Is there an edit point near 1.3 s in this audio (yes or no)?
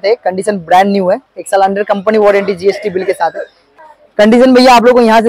no